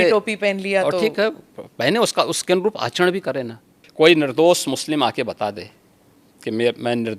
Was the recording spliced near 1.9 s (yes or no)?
no